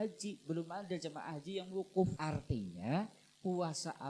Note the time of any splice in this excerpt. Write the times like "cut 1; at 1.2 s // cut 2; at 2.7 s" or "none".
cut 1; at 2.2 s